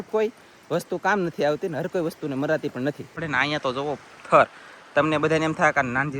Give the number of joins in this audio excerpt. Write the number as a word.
one